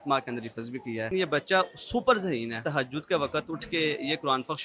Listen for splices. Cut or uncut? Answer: cut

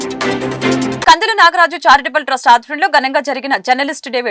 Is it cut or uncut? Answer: cut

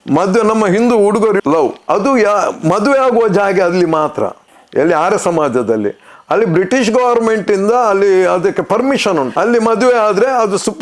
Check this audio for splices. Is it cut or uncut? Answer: uncut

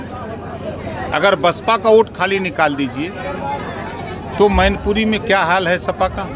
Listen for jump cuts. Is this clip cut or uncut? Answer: uncut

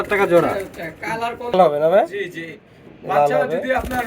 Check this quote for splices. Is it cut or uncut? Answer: cut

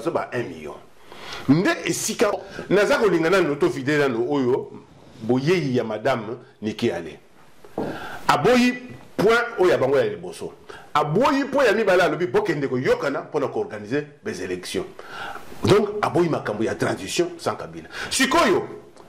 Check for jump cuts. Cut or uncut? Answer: cut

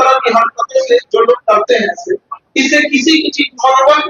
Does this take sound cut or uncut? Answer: uncut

